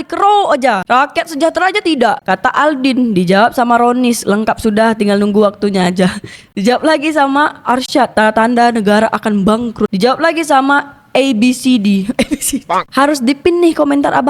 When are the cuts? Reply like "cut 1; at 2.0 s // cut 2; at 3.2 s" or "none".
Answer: none